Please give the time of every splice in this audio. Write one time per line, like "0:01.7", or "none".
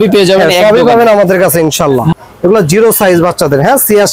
0:02.1